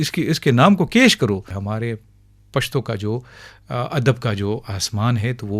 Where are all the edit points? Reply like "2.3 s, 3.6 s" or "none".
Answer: 1.5 s